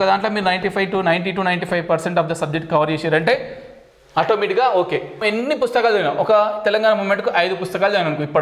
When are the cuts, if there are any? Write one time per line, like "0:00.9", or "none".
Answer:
0:05.2